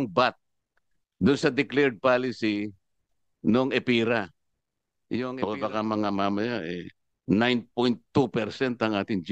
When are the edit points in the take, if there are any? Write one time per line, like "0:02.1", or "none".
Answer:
0:05.3